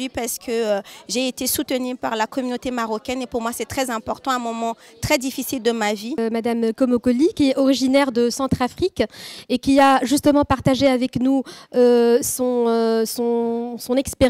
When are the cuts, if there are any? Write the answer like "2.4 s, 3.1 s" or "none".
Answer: 6.2 s